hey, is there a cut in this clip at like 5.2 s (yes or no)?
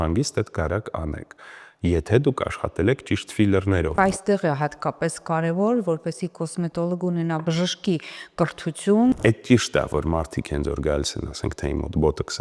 no